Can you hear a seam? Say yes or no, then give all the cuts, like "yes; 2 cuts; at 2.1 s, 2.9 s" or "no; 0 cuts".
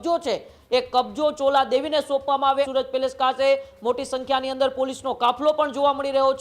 yes; 1 cut; at 2.7 s